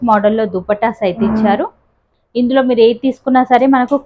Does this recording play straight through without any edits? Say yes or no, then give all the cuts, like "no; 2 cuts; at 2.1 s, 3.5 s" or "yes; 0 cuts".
yes; 0 cuts